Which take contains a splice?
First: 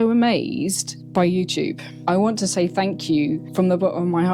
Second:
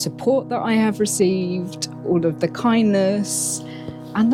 first; 3 cuts; at 0.9 s, 1.9 s, 3.5 s

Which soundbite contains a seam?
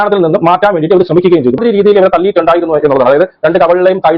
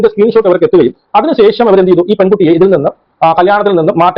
first; 1 cut; at 1.5 s

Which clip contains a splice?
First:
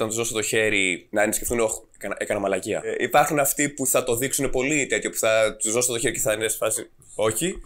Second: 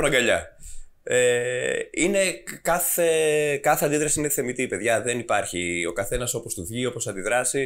first; 2 cuts; at 1.0 s, 2.9 s

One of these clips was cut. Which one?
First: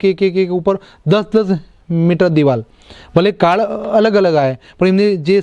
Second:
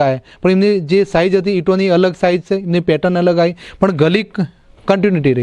first; 1 cut; at 1.8 s

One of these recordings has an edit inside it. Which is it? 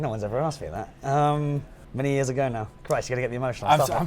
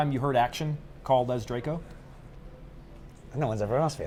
first; 1 cut; at 1.8 s

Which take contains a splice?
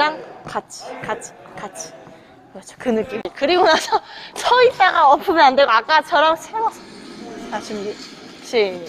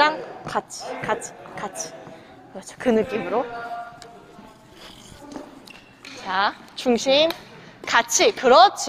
first; 1 cut; at 3.3 s

